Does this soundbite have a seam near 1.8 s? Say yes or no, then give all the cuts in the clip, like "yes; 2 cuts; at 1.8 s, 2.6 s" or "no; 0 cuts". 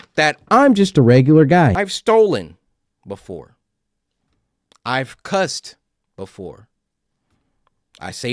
yes; 1 cut; at 1.8 s